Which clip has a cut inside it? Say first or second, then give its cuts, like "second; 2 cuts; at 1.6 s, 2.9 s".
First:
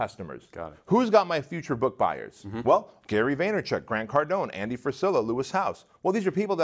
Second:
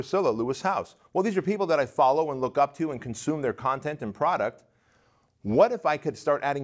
first; 1 cut; at 2.9 s